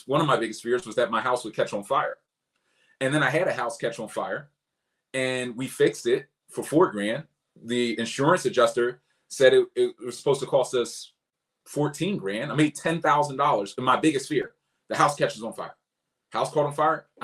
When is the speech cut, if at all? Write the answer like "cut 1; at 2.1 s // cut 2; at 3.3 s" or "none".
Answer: none